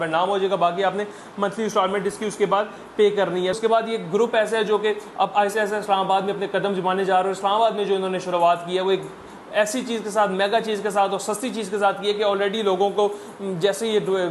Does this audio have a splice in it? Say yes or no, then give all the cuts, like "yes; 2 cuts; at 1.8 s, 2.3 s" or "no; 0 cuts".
yes; 1 cut; at 3.6 s